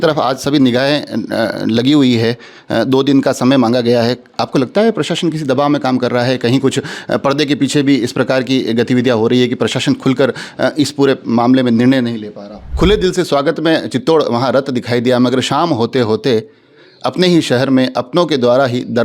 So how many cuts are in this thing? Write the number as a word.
one